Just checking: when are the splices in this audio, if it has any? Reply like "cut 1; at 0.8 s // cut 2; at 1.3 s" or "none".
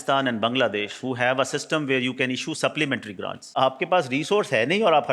cut 1; at 3.4 s